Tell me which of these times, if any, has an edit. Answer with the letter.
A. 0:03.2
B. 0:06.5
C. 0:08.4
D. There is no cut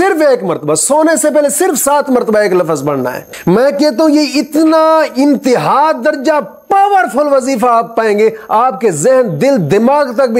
A